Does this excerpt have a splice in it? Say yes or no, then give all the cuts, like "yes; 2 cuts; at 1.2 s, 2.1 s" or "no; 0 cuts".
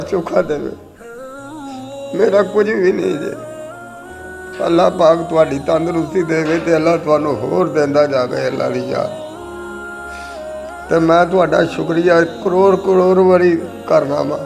no; 0 cuts